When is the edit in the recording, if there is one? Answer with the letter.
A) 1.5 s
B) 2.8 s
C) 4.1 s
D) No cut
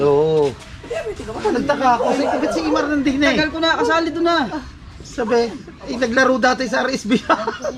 D